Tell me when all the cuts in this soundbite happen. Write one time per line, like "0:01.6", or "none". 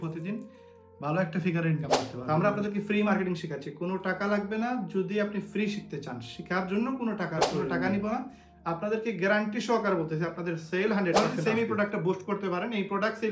0:02.1
0:07.8
0:11.1